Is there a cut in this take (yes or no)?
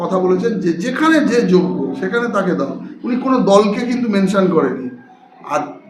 no